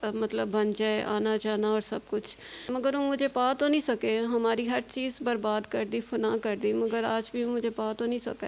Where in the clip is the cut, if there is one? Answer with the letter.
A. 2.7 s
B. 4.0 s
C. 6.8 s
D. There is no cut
A